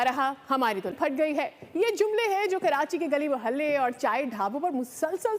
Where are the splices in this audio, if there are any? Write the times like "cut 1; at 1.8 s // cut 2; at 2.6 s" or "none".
cut 1; at 1.0 s